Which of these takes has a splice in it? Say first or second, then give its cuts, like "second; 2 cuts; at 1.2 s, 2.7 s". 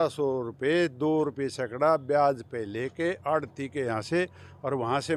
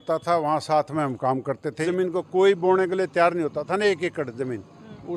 second; 1 cut; at 1.8 s